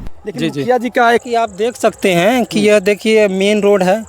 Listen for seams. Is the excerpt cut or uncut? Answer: cut